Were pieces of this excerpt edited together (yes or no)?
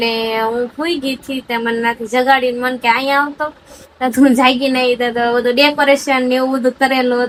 no